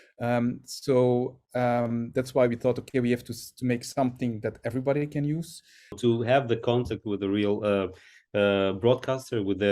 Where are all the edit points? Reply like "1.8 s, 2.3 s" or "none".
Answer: 6.0 s